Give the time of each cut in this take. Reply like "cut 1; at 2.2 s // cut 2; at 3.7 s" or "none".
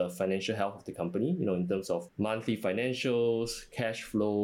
cut 1; at 2.1 s